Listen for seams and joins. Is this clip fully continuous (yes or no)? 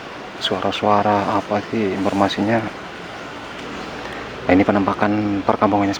no